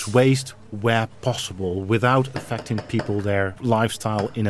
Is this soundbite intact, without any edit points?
no; 1 cut; at 3.6 s

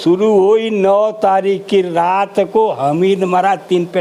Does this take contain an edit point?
no; 0 cuts

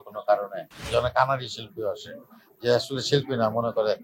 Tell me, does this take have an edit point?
yes; 1 cut; at 0.9 s

